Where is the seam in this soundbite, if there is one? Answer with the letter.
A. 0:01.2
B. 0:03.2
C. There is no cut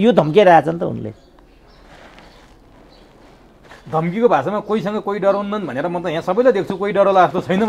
C